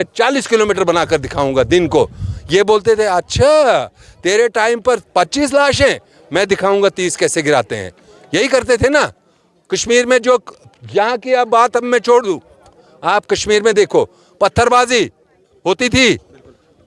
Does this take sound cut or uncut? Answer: uncut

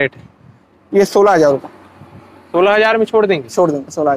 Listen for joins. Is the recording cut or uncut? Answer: uncut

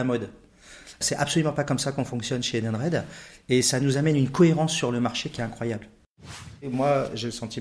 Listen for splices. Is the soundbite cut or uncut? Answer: cut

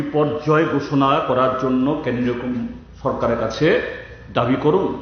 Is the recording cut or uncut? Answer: cut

